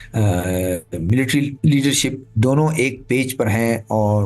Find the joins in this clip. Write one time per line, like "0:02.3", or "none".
0:01.5
0:02.2